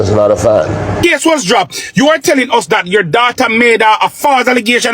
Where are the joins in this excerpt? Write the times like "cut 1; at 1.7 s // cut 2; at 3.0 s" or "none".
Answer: cut 1; at 1.0 s